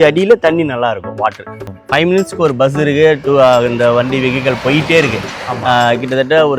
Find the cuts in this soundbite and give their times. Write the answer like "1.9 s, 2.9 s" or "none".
1.8 s